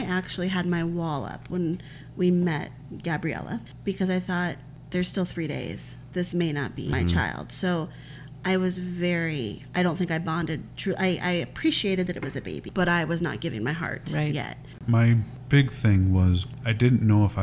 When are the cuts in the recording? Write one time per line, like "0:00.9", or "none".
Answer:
0:03.7
0:04.7
0:06.9
0:12.6
0:14.8